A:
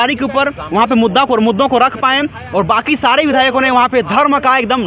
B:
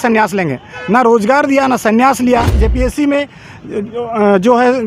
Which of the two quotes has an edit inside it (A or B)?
B